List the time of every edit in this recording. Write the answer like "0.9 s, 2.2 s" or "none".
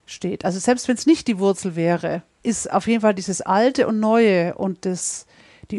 2.3 s

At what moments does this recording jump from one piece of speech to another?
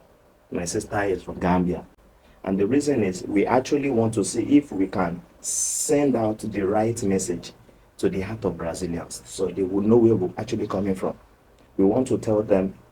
1.9 s

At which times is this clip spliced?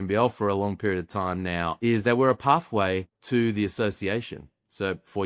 1.8 s, 3.1 s

